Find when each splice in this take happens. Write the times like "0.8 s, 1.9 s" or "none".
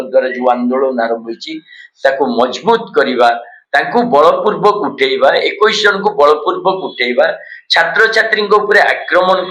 3.5 s